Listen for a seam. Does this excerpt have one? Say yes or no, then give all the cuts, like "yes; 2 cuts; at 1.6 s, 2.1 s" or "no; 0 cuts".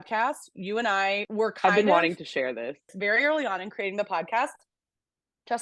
yes; 2 cuts; at 1.3 s, 2.9 s